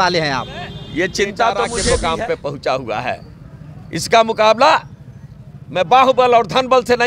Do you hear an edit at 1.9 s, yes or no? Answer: yes